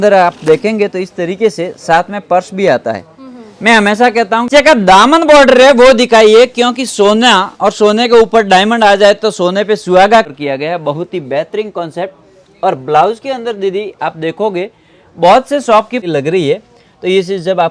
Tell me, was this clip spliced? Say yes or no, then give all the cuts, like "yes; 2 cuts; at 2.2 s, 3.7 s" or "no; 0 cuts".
yes; 3 cuts; at 4.5 s, 10.3 s, 16.0 s